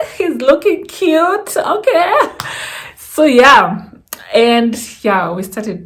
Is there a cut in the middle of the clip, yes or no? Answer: no